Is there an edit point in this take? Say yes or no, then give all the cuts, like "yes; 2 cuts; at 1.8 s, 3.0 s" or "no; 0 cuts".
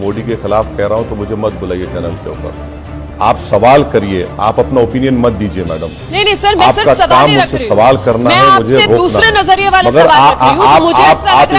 no; 0 cuts